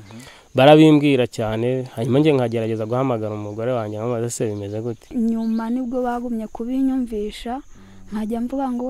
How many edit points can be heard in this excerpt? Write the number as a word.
one